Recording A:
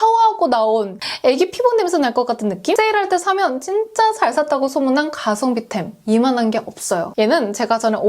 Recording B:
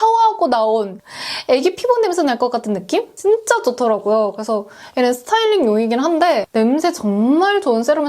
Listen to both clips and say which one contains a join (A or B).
A